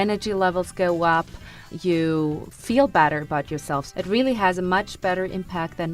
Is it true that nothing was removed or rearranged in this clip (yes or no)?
no